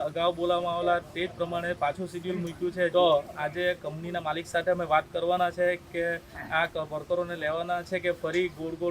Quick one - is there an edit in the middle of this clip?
yes; 1 cut; at 2.9 s

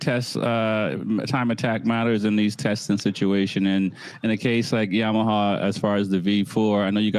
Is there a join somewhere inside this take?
no; 0 cuts

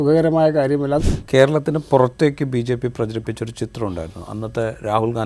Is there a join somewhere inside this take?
yes; 1 cut; at 1.0 s

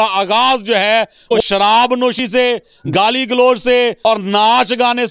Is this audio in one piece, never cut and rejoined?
no; 3 cuts; at 1.4 s, 2.4 s, 4.0 s

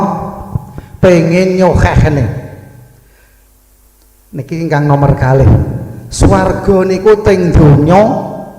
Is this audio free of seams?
yes; 0 cuts

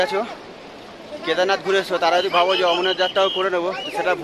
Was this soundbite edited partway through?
no; 0 cuts

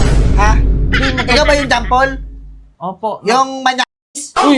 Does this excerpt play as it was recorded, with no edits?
yes; 0 cuts

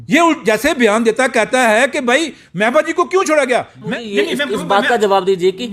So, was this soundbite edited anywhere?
yes; 1 cut; at 3.8 s

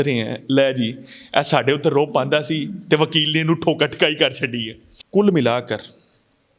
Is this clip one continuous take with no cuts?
yes; 0 cuts

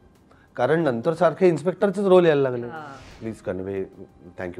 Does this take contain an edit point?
yes; 1 cut; at 2.6 s

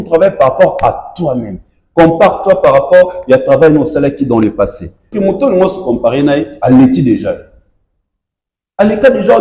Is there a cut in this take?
yes; 1 cut; at 5.1 s

